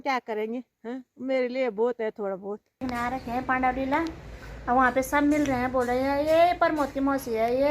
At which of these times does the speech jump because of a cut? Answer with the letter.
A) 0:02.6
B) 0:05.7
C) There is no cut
A